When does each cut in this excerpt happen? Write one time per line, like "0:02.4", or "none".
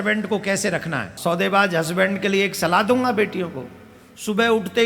0:01.1